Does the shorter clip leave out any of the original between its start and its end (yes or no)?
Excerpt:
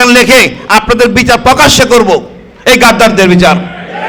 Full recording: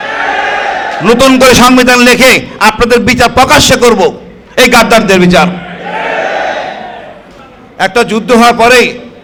no